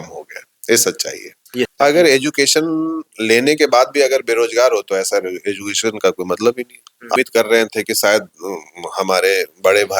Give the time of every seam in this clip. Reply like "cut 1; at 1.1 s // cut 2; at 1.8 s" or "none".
cut 1; at 1.7 s // cut 2; at 7.2 s